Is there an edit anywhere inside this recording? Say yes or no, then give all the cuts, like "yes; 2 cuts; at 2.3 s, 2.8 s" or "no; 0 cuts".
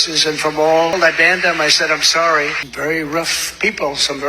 yes; 2 cuts; at 0.9 s, 2.6 s